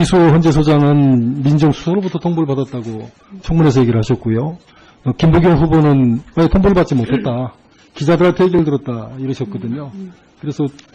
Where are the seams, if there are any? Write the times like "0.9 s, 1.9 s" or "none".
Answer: 7.4 s